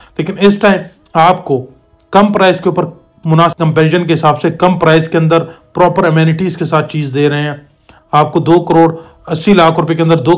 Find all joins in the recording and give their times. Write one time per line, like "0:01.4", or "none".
0:03.6